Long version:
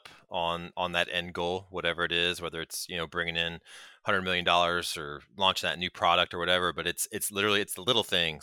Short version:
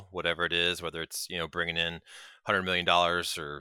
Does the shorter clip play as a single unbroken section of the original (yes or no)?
yes